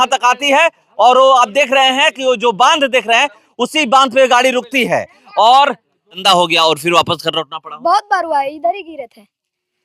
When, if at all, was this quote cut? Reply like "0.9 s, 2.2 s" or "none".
6.2 s

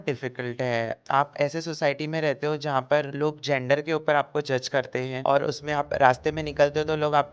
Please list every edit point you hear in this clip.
1.0 s, 3.1 s, 5.1 s

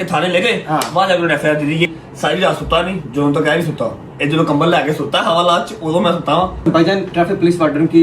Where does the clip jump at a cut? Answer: 1.9 s, 6.6 s

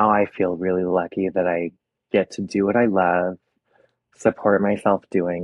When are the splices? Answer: none

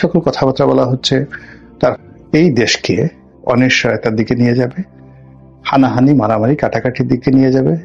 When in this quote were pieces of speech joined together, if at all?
2.0 s

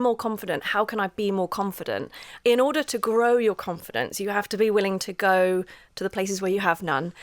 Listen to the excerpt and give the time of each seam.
2.3 s

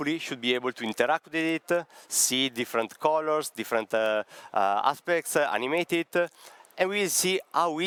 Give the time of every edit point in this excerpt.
none

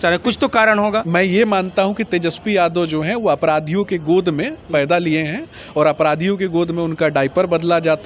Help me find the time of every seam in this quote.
1.1 s

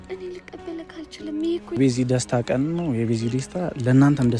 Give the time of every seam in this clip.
1.8 s

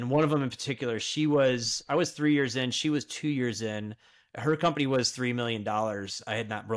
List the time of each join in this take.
none

